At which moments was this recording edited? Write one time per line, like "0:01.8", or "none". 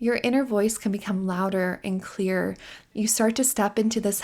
0:02.7